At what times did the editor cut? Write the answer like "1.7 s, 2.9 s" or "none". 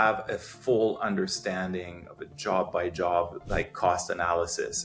none